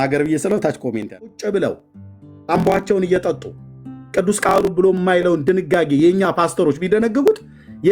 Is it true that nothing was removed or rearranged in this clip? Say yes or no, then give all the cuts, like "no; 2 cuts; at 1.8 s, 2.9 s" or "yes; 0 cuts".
no; 1 cut; at 1.4 s